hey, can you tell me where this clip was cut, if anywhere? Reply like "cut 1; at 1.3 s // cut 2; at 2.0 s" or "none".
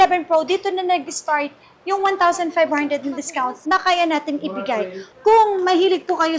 cut 1; at 5.0 s